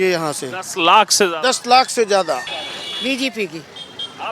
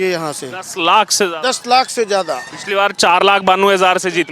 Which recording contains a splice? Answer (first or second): first